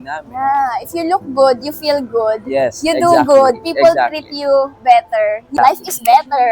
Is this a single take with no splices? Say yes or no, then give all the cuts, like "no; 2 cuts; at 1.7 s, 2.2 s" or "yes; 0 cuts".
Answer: no; 1 cut; at 5.5 s